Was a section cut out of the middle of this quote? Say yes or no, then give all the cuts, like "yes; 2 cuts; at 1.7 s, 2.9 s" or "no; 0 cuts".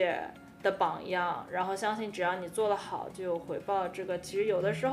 no; 0 cuts